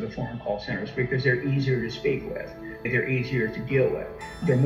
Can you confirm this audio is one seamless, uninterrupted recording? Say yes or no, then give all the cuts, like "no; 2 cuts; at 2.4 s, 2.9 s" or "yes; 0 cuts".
yes; 0 cuts